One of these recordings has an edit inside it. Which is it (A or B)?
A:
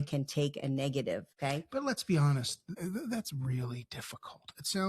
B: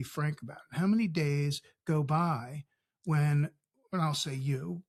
A